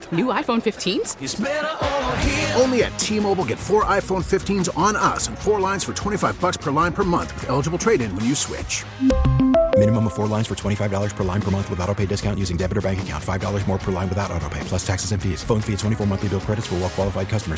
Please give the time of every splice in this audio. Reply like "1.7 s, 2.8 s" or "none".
none